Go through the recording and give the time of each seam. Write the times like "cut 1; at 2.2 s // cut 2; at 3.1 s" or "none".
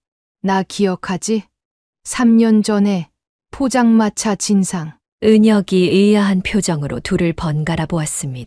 none